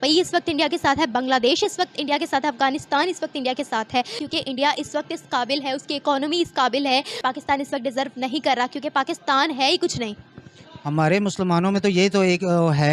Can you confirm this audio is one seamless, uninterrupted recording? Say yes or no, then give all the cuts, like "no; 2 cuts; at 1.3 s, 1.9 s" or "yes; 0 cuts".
no; 3 cuts; at 4.2 s, 7.2 s, 10.7 s